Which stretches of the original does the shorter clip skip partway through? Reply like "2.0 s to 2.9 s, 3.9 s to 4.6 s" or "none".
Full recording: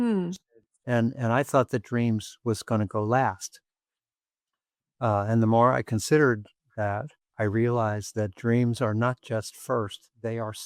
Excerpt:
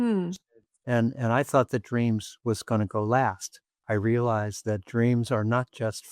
3.7 s to 7.2 s